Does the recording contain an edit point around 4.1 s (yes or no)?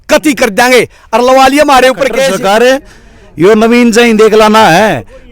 no